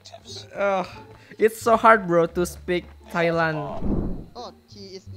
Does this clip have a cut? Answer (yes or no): yes